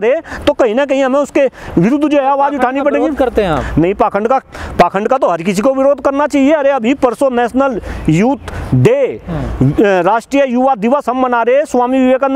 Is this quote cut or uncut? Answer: uncut